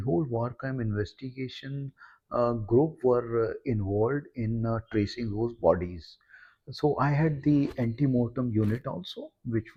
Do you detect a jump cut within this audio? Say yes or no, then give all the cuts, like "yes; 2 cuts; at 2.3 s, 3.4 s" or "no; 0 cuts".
no; 0 cuts